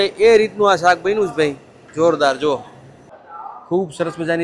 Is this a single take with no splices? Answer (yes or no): no